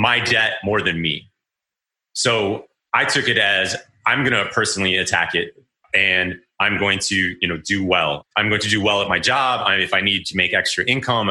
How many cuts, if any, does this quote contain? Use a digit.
1